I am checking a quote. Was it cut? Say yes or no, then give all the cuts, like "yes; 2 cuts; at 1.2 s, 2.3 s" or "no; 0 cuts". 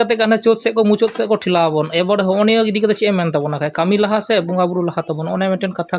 no; 0 cuts